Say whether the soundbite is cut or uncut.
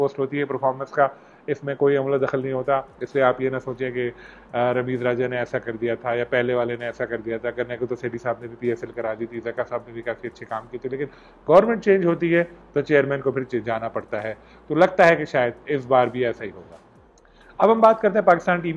uncut